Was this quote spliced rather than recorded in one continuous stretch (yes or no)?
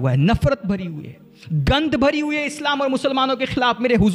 no